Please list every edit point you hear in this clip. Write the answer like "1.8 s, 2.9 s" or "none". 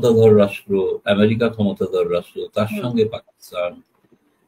none